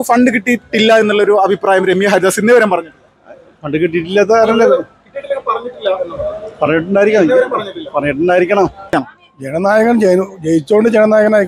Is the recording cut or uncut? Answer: cut